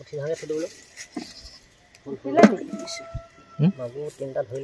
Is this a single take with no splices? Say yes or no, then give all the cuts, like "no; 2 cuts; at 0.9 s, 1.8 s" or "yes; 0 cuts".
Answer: yes; 0 cuts